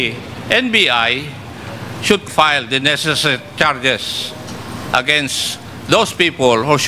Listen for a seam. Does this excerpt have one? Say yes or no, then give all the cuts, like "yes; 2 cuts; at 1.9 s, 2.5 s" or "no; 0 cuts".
yes; 1 cut; at 2.2 s